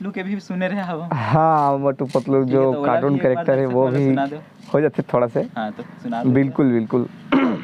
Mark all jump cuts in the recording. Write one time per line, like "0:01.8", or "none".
none

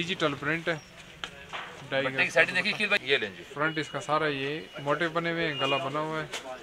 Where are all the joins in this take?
0:03.0

